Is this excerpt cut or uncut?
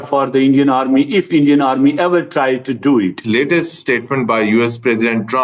cut